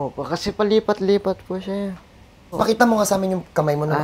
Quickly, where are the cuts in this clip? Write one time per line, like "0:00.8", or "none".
0:02.6